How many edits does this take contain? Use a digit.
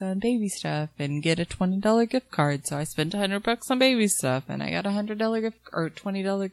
0